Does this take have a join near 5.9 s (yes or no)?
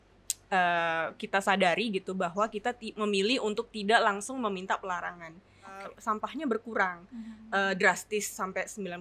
yes